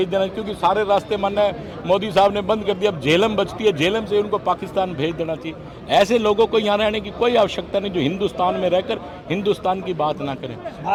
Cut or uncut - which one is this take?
uncut